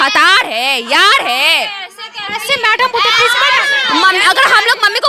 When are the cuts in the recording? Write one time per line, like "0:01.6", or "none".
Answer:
none